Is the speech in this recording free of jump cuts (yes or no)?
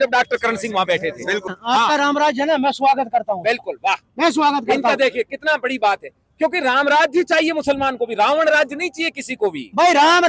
no